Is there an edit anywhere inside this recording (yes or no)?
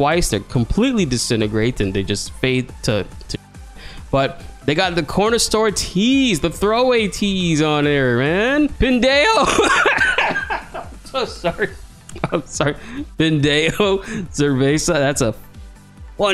yes